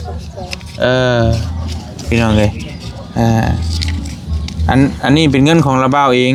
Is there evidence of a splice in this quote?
no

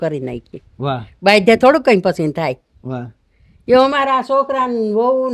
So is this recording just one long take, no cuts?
yes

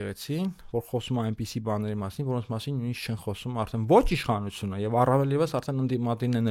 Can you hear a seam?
no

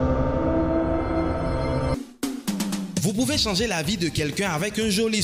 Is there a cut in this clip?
yes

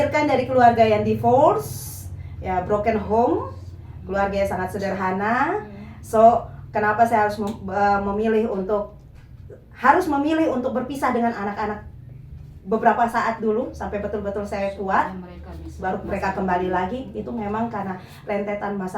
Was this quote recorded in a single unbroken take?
yes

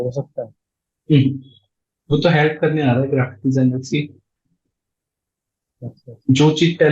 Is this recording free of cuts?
yes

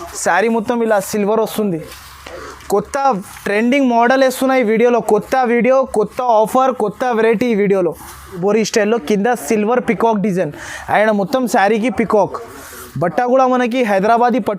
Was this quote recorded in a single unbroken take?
no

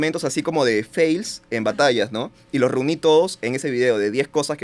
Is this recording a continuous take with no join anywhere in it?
yes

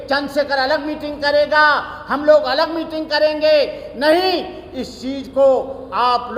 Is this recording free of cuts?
yes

